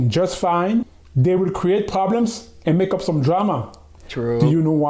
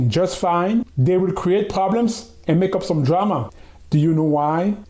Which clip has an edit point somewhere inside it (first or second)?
second